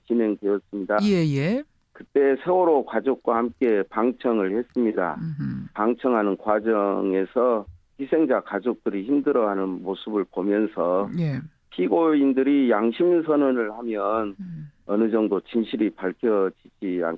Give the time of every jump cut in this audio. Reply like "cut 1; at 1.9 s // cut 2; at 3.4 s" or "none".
none